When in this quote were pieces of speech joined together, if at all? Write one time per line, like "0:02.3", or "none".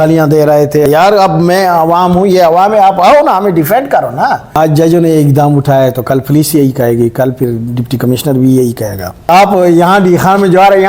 0:00.8
0:04.6
0:09.3